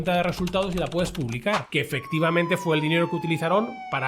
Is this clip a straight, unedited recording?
no; 1 cut; at 1.6 s

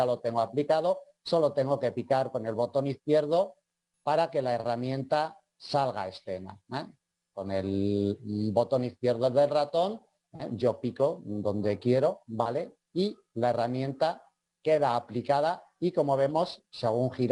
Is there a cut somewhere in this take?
no; 0 cuts

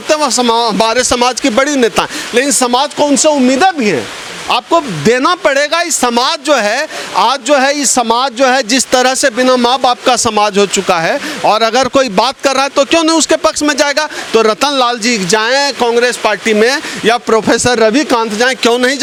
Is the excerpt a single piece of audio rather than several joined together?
yes; 0 cuts

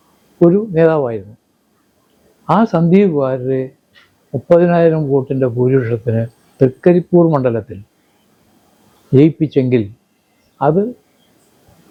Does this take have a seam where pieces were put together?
no; 0 cuts

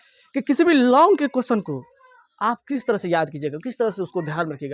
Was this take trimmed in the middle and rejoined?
yes; 1 cut; at 2.6 s

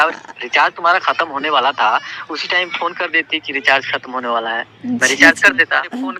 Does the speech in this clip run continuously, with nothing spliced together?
yes; 0 cuts

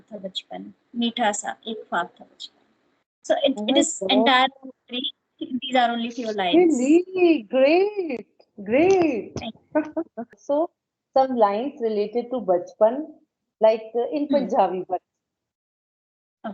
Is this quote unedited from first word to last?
no; 1 cut; at 10.4 s

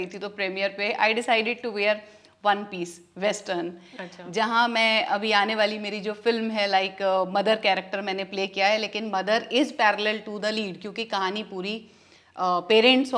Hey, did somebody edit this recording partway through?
no; 0 cuts

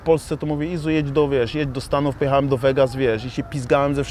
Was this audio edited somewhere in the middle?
no; 0 cuts

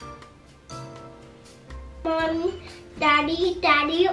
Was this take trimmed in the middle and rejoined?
no; 0 cuts

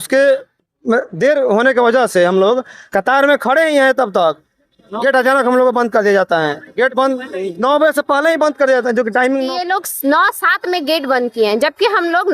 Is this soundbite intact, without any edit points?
no; 1 cut; at 9.5 s

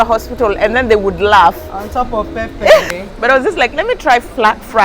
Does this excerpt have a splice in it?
yes; 1 cut; at 2.8 s

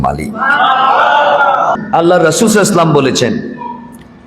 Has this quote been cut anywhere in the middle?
yes; 1 cut; at 1.8 s

